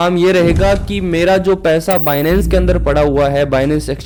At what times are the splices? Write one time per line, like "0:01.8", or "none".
none